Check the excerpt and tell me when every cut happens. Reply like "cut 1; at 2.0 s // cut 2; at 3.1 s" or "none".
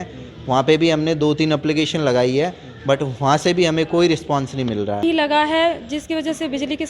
cut 1; at 5.0 s